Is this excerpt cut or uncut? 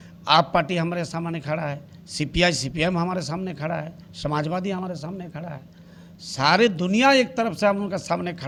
uncut